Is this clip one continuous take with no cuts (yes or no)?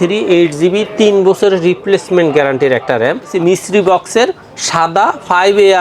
no